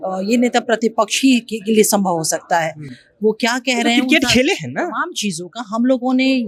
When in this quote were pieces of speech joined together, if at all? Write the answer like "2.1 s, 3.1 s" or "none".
none